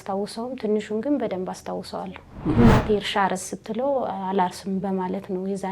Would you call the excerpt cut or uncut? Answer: cut